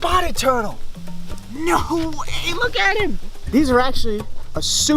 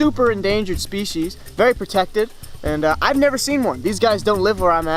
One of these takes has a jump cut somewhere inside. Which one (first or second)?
first